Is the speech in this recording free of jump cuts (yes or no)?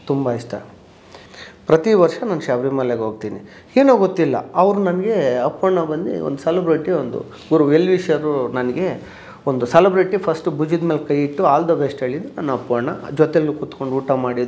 no